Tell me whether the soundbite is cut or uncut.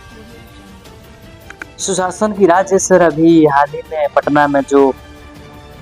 cut